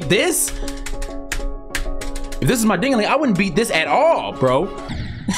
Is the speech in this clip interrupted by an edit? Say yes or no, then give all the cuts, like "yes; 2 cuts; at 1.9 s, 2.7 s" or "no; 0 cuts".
no; 0 cuts